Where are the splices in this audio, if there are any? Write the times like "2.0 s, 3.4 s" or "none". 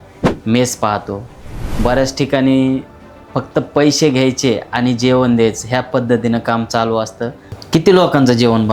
7.5 s